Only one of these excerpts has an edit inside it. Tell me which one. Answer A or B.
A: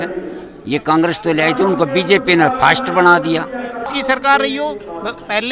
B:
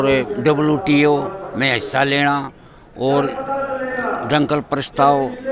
A